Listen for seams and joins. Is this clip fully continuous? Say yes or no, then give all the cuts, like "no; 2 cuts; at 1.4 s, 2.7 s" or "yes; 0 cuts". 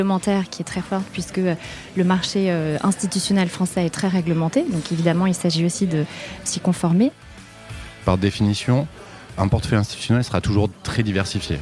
no; 1 cut; at 7.7 s